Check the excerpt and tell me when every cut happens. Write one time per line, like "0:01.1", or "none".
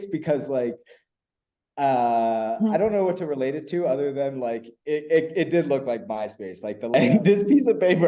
0:06.9

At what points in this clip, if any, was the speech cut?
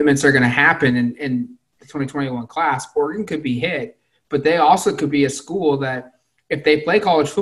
none

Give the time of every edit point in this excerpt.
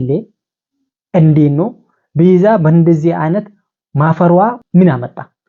0:04.5

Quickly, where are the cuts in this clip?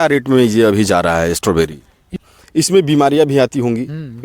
0:02.2

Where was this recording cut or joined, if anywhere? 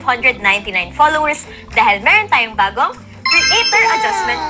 none

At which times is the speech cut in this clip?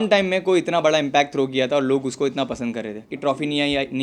0:03.1

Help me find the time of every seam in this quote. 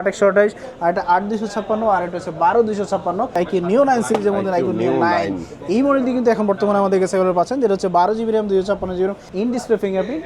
0:03.4
0:09.2

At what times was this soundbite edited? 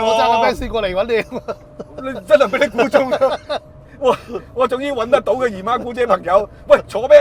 none

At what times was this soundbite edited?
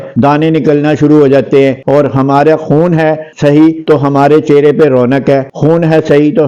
0:01.8

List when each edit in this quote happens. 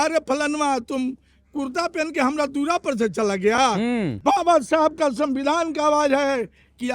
0:04.1

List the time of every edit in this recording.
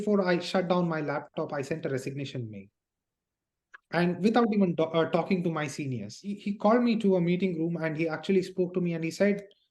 0:06.4

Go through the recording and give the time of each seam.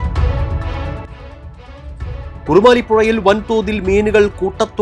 0:00.7
0:02.2

